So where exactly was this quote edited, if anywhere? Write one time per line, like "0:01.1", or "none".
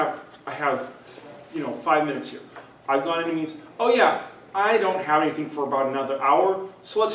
none